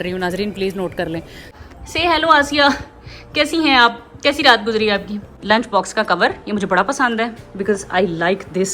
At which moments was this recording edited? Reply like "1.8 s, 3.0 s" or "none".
1.5 s, 5.3 s